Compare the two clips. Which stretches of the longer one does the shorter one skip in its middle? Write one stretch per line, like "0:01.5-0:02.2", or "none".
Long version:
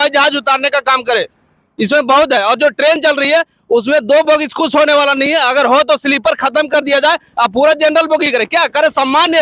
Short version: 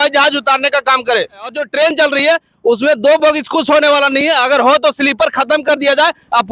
0:01.6-0:02.7